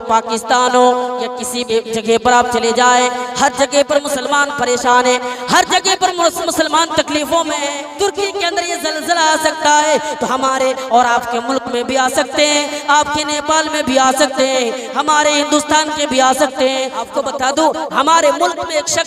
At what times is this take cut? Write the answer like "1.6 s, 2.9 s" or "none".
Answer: 1.6 s, 7.8 s, 17.0 s